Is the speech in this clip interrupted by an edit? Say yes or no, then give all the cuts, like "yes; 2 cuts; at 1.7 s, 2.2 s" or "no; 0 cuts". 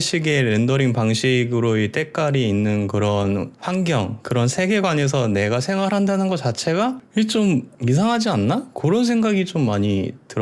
no; 0 cuts